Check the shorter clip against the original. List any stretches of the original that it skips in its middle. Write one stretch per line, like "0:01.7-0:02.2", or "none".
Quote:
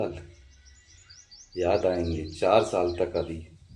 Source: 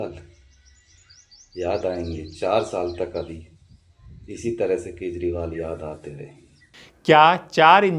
none